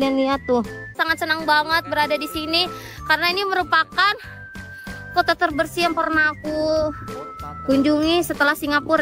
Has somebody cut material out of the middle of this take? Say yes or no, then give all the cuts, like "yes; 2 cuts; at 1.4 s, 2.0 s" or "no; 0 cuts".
yes; 1 cut; at 1.0 s